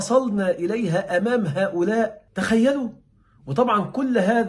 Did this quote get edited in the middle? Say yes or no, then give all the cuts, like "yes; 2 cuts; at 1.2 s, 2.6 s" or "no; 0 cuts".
no; 0 cuts